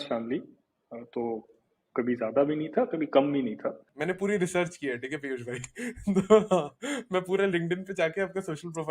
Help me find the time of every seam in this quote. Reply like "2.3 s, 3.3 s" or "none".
3.9 s